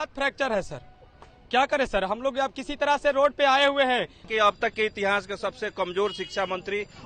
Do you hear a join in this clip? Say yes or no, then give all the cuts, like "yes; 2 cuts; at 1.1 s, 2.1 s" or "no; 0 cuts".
yes; 1 cut; at 4.2 s